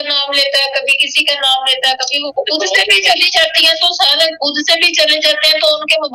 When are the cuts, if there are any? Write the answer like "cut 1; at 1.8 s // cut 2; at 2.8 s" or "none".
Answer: none